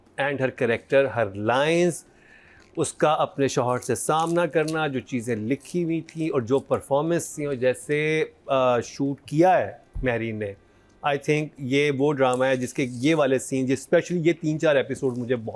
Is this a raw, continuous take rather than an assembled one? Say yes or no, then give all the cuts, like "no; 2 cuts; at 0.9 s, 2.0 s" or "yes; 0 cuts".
yes; 0 cuts